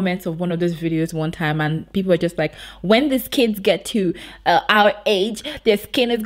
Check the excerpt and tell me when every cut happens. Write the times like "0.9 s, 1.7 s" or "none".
none